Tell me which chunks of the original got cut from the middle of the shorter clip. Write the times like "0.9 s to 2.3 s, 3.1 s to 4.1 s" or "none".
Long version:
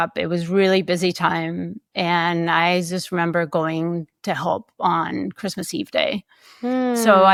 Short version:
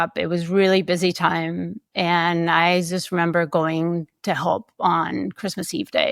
none